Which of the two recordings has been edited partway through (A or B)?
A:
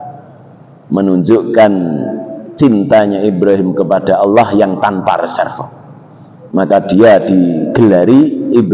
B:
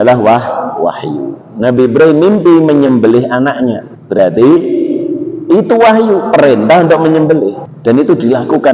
B